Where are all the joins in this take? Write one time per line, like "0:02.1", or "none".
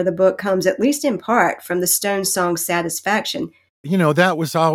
0:03.8